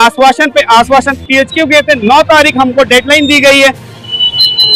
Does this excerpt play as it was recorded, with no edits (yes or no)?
yes